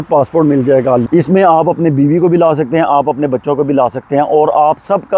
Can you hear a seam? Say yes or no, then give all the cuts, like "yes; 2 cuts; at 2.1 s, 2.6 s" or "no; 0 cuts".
yes; 1 cut; at 1.0 s